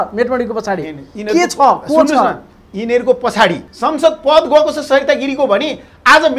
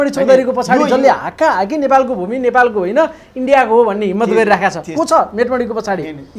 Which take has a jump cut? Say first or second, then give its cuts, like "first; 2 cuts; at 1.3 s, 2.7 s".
first; 1 cut; at 3.7 s